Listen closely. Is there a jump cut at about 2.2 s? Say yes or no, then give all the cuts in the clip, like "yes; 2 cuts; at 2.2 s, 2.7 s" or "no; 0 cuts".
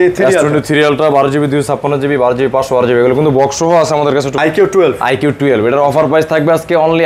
no; 1 cut; at 4.4 s